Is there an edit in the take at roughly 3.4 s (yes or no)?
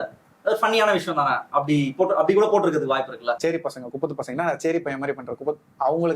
yes